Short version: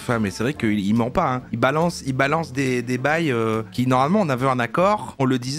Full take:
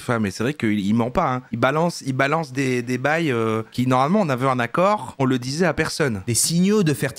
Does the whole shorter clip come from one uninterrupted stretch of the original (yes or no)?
yes